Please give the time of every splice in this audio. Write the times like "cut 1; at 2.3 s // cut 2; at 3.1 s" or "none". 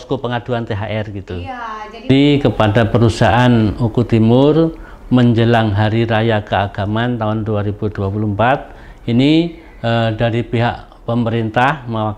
cut 1; at 2.1 s